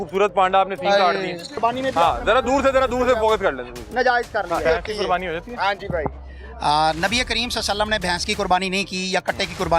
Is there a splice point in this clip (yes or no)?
yes